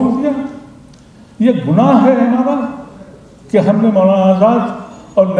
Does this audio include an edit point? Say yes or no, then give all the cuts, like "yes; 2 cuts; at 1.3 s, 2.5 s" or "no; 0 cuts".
no; 0 cuts